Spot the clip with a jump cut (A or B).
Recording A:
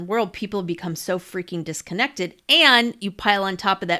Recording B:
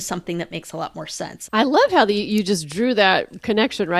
B